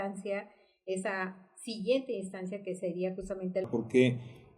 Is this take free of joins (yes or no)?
no